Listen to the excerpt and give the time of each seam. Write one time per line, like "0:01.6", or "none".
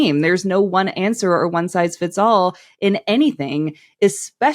none